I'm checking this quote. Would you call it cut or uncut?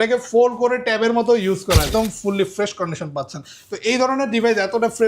cut